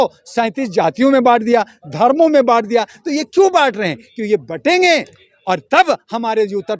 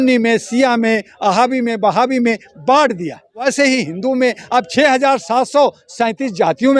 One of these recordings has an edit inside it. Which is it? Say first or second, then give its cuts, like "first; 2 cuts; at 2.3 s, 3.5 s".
second; 2 cuts; at 3.4 s, 4.7 s